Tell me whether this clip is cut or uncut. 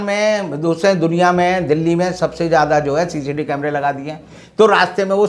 uncut